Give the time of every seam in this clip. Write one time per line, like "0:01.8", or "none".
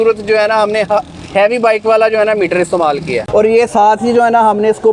0:03.3